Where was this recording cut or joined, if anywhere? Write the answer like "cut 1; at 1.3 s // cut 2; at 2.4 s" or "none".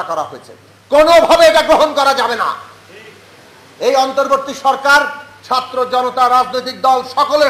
none